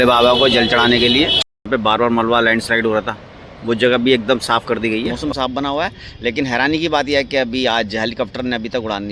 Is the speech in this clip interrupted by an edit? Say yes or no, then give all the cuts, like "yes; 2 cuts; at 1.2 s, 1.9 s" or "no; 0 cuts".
yes; 2 cuts; at 1.6 s, 5.1 s